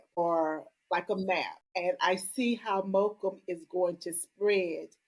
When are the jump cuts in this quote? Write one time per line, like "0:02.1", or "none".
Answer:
0:01.6